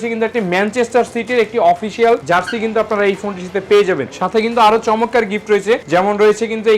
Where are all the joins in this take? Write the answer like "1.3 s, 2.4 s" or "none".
none

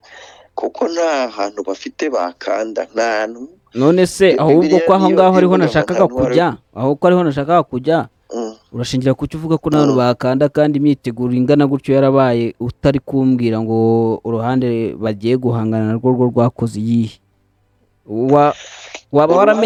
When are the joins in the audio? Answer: none

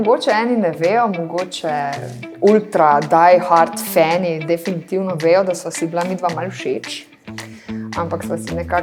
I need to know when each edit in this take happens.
2.2 s

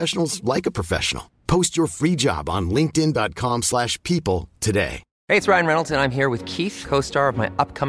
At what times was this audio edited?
5.1 s

